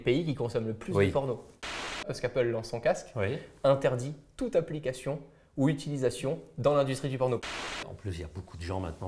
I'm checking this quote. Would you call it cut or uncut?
cut